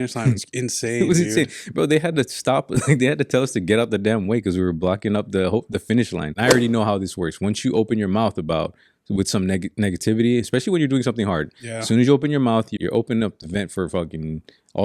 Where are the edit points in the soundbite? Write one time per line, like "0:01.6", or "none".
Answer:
0:06.3
0:12.7